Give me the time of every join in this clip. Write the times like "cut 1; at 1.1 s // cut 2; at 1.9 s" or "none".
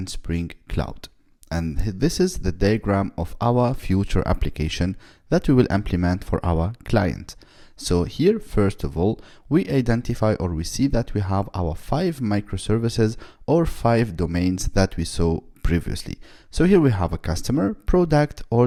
none